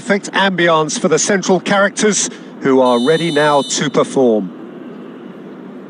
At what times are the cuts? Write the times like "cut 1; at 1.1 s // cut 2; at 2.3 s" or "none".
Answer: cut 1; at 4.5 s